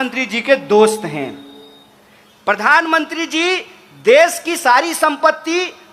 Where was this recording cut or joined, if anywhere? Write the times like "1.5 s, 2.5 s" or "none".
none